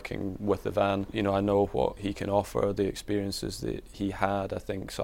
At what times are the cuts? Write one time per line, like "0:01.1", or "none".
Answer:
0:01.1
0:02.0
0:03.9